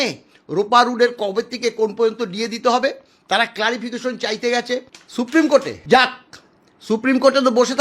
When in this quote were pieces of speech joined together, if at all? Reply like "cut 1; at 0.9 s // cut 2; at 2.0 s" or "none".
cut 1; at 5.0 s // cut 2; at 5.7 s